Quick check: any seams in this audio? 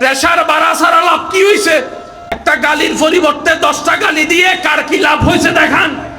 yes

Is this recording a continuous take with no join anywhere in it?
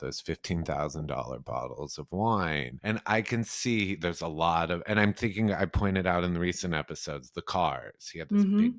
no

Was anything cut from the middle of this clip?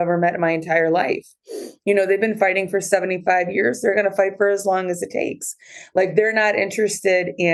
no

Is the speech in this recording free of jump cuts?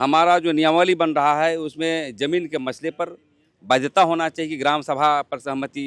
yes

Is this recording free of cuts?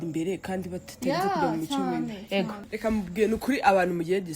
no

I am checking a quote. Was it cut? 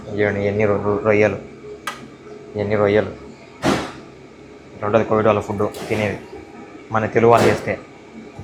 no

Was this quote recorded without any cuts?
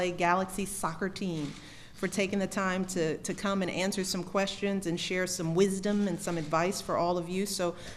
no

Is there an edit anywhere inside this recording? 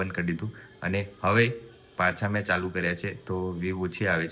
no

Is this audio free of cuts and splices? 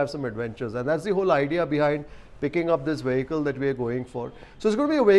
yes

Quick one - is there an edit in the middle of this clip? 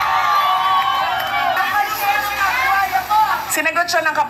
yes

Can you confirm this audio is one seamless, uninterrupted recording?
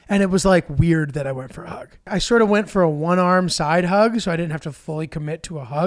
no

